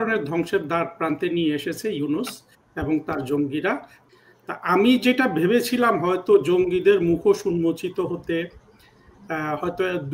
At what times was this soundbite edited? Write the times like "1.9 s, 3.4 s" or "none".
3.9 s